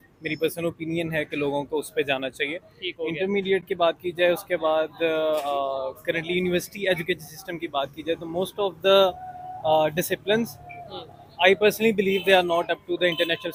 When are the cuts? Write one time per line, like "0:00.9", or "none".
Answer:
none